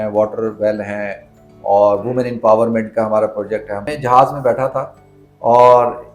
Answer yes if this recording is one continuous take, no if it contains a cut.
no